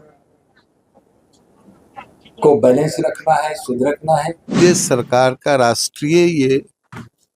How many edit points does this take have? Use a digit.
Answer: 1